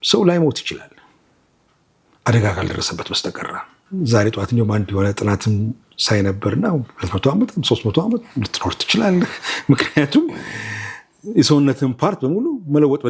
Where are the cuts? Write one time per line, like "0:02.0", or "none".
0:03.8